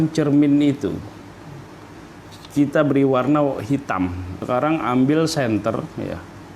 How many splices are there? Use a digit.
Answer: 2